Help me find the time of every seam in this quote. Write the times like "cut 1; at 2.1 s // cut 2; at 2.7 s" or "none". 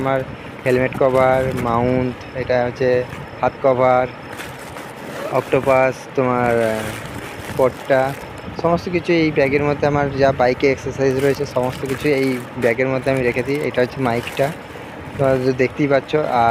none